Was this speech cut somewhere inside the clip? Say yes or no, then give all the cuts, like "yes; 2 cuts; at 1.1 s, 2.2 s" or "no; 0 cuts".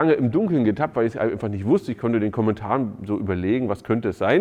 no; 0 cuts